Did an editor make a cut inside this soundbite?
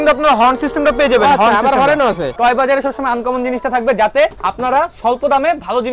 yes; 2 cuts; at 2.3 s, 4.4 s

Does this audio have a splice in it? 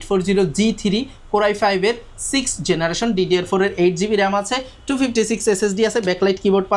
no; 0 cuts

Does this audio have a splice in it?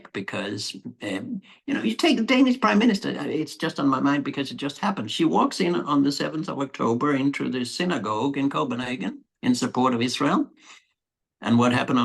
no; 0 cuts

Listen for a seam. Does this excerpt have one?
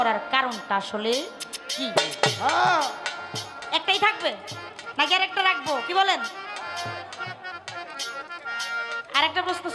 no; 0 cuts

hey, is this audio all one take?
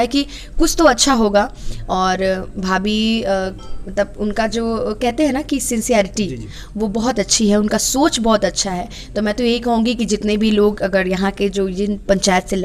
yes; 0 cuts

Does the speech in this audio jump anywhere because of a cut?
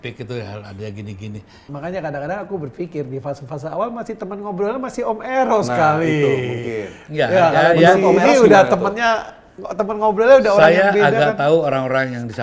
yes; 1 cut; at 1.6 s

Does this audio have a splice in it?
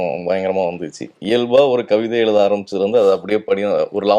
yes; 1 cut; at 1.2 s

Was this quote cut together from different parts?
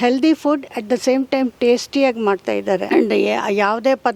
no; 0 cuts

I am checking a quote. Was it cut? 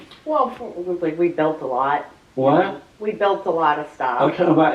yes; 1 cut; at 2.2 s

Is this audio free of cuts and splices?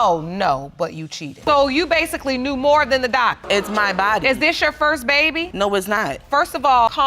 no; 2 cuts; at 1.4 s, 5.5 s

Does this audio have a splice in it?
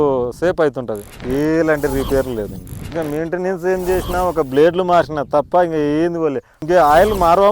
yes; 3 cuts; at 1.1 s, 2.8 s, 6.5 s

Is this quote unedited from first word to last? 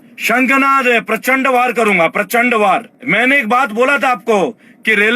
no; 1 cut; at 3.1 s

